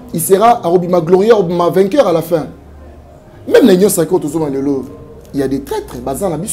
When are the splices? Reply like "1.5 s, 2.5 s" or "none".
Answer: none